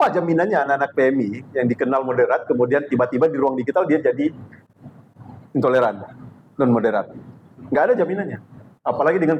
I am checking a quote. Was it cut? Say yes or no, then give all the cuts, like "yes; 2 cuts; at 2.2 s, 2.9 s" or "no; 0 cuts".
no; 0 cuts